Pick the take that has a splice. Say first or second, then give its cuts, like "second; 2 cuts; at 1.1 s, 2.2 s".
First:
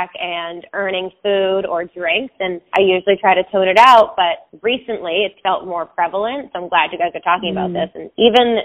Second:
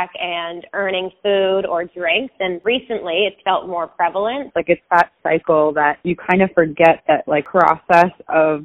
second; 3 cuts; at 2.5 s, 4.5 s, 7.5 s